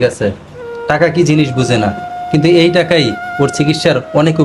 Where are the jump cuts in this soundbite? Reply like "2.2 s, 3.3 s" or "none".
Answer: none